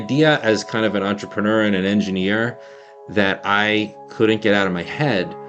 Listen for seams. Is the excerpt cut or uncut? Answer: uncut